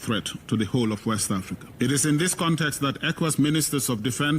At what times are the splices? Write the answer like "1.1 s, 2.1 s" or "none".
1.6 s